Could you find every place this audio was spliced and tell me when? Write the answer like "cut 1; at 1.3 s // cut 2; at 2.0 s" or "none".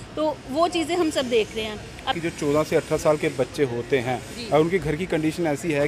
cut 1; at 2.1 s